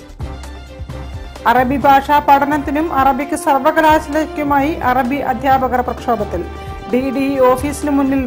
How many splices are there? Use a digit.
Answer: 1